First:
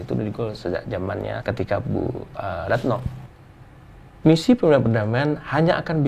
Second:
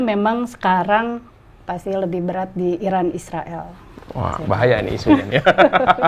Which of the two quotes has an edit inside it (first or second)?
first